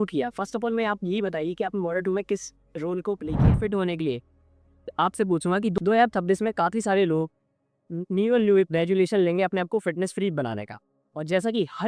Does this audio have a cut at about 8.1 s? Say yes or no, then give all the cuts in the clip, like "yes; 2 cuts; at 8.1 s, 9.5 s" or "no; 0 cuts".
no; 1 cut; at 3.6 s